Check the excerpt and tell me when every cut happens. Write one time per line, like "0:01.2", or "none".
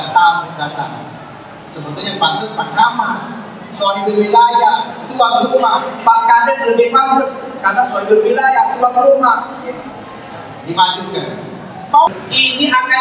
0:12.1